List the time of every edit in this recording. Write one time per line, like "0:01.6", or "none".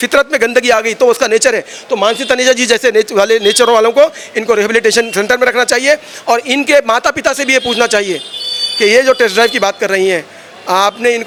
none